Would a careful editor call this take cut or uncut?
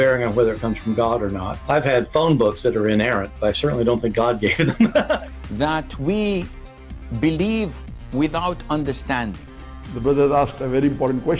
cut